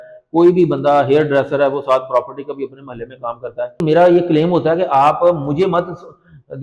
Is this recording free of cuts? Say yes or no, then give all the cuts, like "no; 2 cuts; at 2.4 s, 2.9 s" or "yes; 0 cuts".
no; 1 cut; at 3.8 s